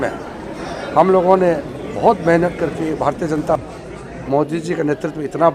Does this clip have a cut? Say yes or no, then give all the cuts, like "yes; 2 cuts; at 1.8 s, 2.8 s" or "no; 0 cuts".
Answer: yes; 1 cut; at 3.6 s